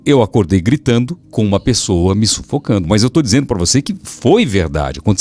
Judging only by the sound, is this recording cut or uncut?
cut